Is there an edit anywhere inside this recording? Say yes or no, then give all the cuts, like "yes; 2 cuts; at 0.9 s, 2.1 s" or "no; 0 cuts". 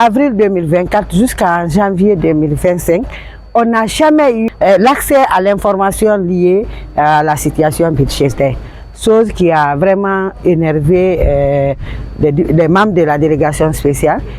yes; 1 cut; at 4.5 s